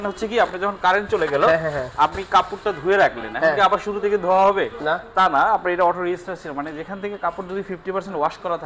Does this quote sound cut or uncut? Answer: uncut